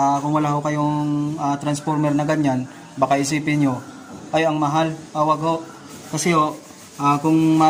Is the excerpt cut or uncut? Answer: uncut